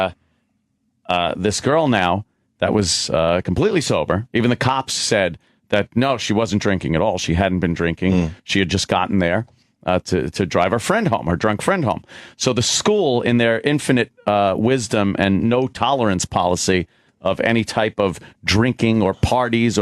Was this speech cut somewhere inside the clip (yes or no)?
yes